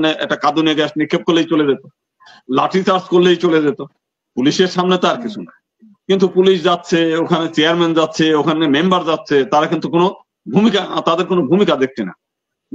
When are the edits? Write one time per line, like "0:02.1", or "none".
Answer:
none